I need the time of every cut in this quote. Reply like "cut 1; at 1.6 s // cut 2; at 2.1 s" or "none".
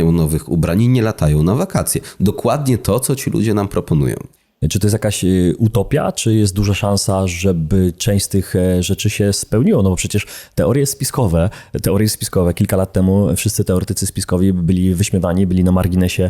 none